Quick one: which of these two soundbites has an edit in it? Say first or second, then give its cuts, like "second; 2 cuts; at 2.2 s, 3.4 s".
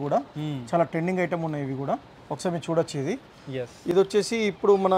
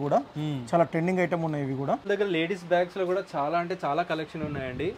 second; 1 cut; at 2.1 s